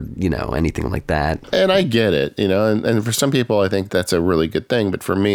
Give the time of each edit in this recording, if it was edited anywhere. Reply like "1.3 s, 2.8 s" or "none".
1.4 s